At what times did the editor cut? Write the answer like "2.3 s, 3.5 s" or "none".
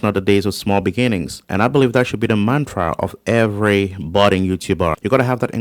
1.4 s